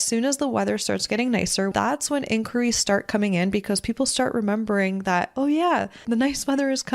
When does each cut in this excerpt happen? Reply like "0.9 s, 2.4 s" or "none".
1.7 s, 6.0 s